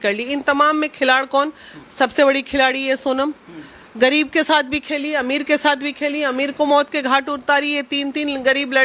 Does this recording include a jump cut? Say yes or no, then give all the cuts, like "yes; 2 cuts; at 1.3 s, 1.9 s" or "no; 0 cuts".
no; 0 cuts